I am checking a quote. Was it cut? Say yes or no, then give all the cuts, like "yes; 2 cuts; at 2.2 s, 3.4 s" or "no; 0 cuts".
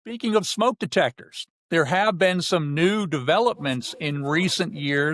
no; 0 cuts